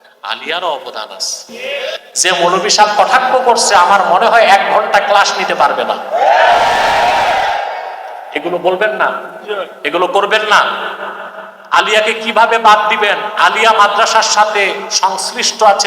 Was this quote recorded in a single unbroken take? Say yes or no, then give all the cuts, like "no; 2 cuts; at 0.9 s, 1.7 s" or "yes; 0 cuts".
no; 1 cut; at 1.9 s